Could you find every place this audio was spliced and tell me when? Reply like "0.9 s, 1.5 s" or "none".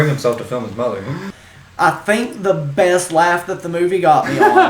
1.2 s